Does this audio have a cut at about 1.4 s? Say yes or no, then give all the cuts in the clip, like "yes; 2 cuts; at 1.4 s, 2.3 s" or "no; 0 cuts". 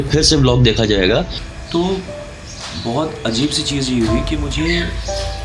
yes; 1 cut; at 1.4 s